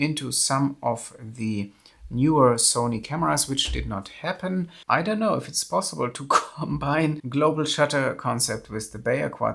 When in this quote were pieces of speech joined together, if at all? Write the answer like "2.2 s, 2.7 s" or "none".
4.8 s, 7.2 s